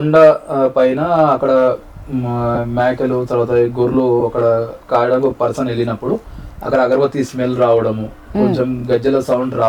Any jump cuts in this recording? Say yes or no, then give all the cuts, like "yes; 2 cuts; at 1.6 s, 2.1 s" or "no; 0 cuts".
no; 0 cuts